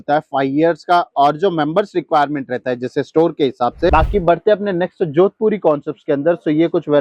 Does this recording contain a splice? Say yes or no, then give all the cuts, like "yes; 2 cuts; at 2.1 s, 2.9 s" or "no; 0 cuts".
yes; 1 cut; at 3.9 s